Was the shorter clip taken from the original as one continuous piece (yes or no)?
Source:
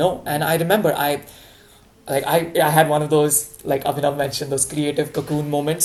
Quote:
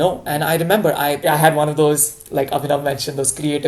no